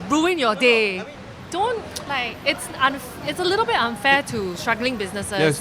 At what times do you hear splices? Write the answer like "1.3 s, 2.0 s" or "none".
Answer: 0.9 s